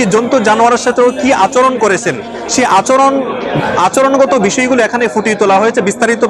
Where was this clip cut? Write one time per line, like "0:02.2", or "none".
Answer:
none